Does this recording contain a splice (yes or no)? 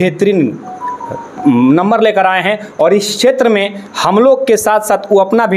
no